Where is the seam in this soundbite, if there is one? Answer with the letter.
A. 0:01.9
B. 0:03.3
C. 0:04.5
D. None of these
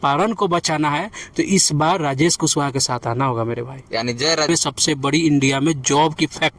C